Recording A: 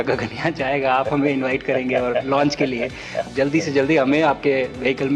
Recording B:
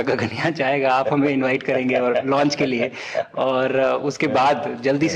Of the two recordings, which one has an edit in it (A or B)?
A